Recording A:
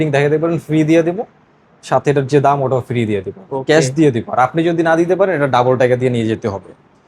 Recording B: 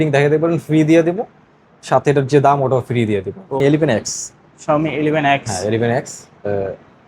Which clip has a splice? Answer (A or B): B